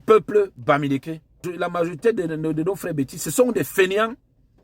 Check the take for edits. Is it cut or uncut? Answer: cut